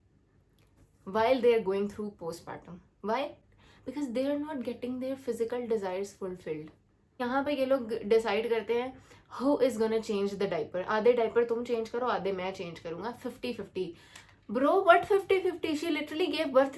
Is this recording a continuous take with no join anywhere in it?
no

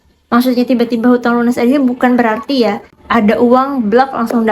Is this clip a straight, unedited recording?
no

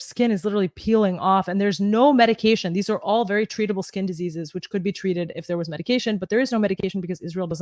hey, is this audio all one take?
yes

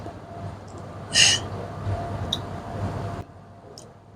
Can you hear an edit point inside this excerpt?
yes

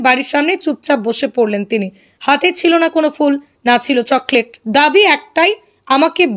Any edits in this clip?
no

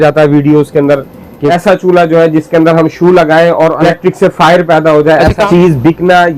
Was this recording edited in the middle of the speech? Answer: yes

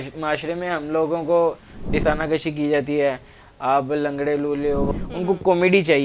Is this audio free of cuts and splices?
no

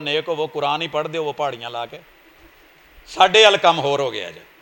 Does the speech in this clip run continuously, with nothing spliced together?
yes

